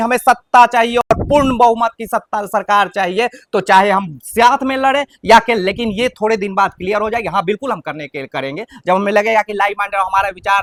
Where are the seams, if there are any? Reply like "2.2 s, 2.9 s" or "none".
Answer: none